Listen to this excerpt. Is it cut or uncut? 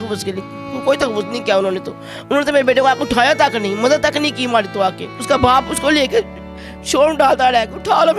cut